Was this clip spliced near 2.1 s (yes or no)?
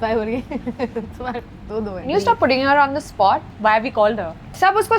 yes